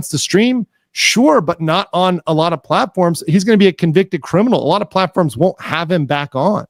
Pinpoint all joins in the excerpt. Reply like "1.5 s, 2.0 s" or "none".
none